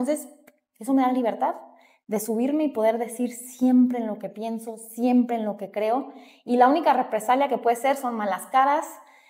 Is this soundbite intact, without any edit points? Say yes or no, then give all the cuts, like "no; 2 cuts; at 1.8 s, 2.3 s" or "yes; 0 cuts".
yes; 0 cuts